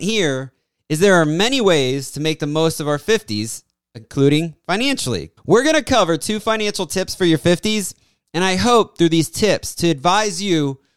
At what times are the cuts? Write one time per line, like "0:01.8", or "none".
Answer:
0:05.4